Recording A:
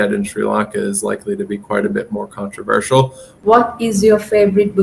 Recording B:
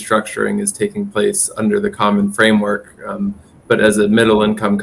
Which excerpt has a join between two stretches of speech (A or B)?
A